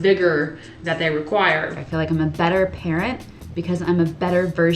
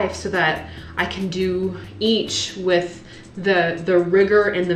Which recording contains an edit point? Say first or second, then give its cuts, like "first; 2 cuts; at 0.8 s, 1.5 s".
first; 1 cut; at 1.6 s